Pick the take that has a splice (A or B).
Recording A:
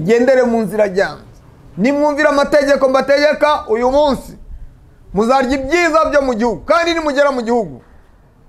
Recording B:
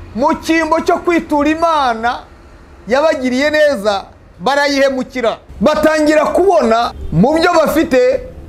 B